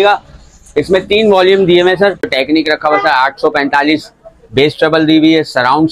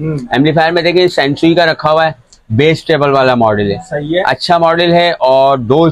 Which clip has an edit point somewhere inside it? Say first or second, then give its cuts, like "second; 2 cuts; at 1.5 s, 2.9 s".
first; 1 cut; at 2.3 s